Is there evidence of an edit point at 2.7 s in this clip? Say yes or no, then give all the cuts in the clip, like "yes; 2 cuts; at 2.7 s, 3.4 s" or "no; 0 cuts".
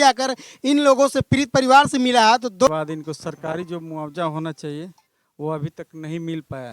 yes; 1 cut; at 2.7 s